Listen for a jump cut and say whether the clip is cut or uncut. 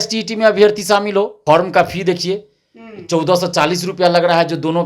cut